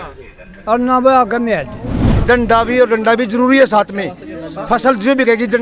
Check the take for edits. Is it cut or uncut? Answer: cut